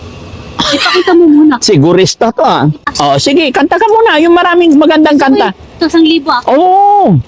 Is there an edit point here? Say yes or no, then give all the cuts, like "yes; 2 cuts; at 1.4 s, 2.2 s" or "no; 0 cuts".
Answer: yes; 1 cut; at 2.9 s